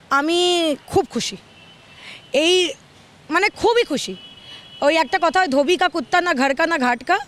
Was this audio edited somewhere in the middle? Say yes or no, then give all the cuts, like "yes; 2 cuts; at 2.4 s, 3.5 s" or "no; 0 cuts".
no; 0 cuts